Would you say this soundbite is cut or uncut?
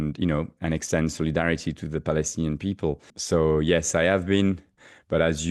cut